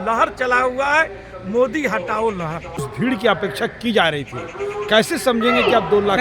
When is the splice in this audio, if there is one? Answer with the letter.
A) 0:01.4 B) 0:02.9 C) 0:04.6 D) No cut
B